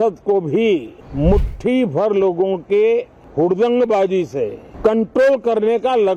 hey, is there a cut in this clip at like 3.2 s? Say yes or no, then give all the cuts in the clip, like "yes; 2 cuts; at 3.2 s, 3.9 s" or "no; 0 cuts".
yes; 3 cuts; at 1.0 s, 3.2 s, 4.6 s